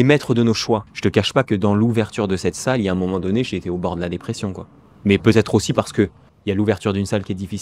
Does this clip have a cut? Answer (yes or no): yes